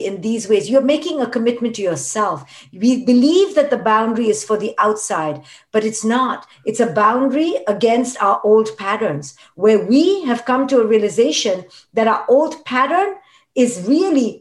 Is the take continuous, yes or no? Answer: yes